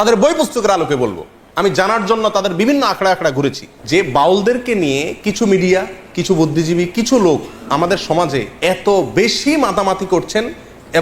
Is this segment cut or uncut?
cut